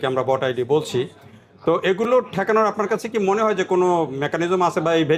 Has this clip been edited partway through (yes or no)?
no